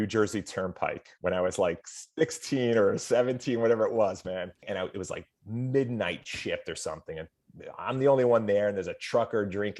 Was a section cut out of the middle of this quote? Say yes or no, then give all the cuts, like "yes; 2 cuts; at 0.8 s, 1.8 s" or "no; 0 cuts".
yes; 1 cut; at 4.6 s